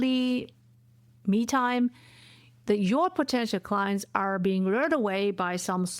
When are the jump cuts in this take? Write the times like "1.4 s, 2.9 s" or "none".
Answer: none